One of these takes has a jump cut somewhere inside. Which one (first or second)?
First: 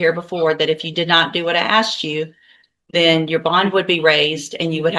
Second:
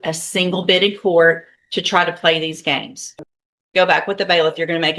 second